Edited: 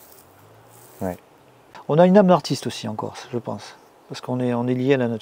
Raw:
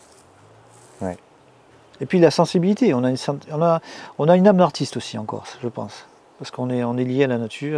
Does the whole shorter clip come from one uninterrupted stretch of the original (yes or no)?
no